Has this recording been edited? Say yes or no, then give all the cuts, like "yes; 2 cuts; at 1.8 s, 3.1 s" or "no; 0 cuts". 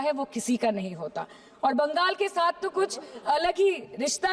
no; 0 cuts